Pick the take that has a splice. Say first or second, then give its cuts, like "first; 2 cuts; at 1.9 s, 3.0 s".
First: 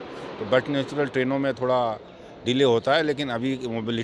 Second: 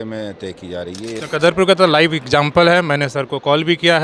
second; 1 cut; at 1.2 s